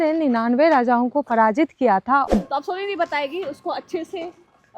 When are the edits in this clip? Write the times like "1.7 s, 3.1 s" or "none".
2.3 s